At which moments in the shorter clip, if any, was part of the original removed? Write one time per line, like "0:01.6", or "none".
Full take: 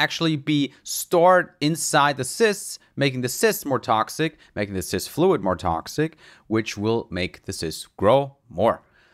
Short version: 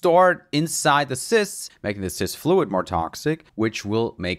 0:01.7
0:03.5

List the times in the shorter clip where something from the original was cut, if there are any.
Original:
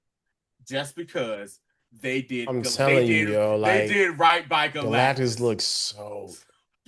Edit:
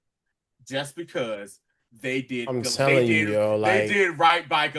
none

